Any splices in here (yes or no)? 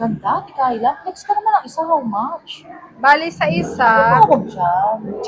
no